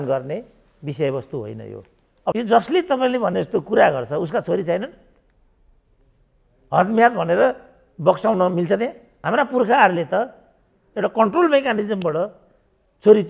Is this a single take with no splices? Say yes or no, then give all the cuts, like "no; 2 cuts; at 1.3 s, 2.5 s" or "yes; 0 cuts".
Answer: no; 2 cuts; at 2.3 s, 9.1 s